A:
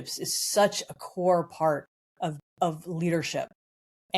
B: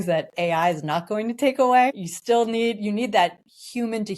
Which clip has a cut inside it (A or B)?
B